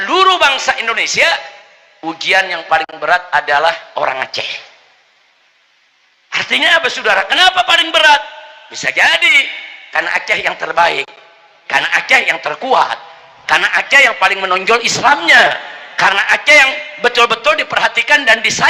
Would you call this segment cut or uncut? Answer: uncut